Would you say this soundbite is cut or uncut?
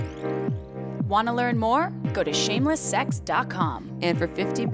cut